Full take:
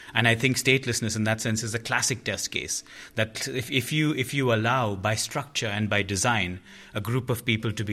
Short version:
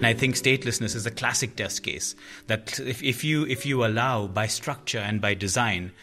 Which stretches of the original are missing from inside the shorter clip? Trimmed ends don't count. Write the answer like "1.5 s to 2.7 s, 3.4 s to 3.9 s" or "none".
1.1 s to 1.6 s